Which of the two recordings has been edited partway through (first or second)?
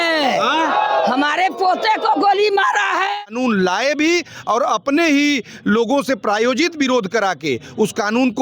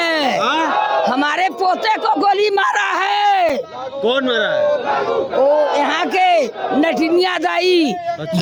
first